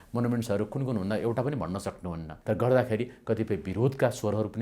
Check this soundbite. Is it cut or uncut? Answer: cut